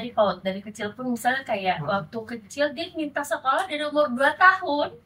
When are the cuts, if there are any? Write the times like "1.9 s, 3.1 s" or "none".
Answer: none

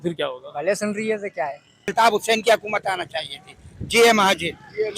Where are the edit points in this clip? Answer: 1.9 s

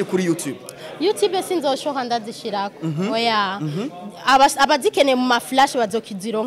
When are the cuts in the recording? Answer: none

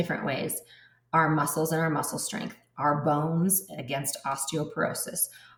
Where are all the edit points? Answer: none

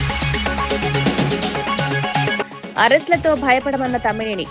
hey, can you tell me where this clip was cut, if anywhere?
2.3 s

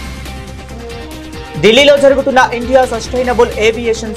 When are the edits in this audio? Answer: 1.0 s

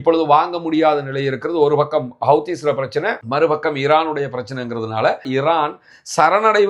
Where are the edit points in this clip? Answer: 5.3 s

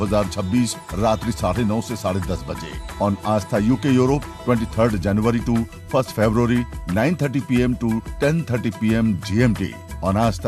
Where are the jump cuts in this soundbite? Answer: none

